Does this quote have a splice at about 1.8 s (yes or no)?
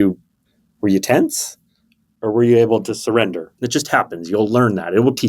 no